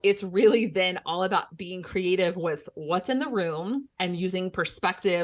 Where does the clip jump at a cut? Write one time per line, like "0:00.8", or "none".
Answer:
0:03.9